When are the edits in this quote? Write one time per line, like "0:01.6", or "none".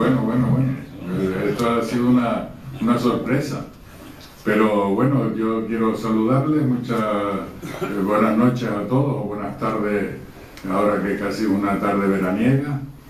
0:01.0